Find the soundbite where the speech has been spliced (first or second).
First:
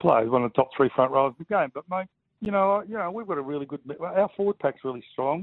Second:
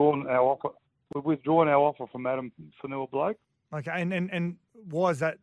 second